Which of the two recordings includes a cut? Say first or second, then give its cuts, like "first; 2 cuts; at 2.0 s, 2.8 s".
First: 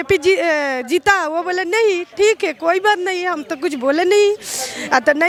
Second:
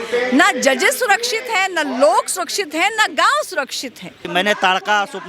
second; 1 cut; at 4.3 s